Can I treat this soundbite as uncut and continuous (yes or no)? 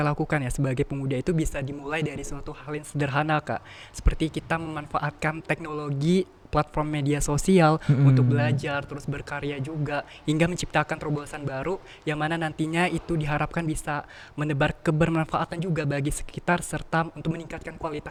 yes